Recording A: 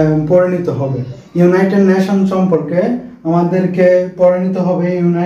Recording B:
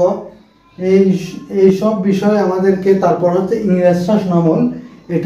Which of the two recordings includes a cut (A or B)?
A